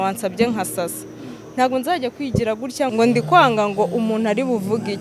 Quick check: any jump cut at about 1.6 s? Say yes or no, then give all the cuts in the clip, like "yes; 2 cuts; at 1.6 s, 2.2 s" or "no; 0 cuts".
no; 1 cut; at 2.9 s